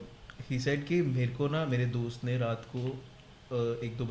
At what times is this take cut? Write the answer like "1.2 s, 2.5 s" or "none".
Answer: none